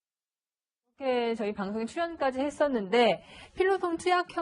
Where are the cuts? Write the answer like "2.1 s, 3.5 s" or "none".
1.7 s